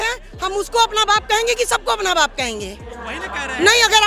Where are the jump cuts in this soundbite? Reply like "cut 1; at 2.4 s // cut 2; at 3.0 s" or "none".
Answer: cut 1; at 3.1 s